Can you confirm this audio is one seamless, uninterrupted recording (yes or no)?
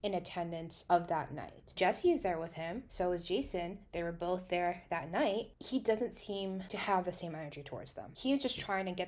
no